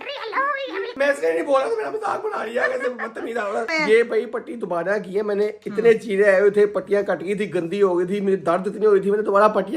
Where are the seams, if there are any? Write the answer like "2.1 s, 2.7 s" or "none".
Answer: 0.9 s, 3.7 s